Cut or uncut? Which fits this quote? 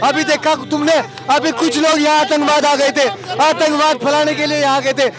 uncut